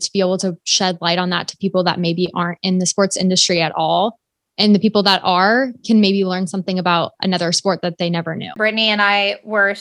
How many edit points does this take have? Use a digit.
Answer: 1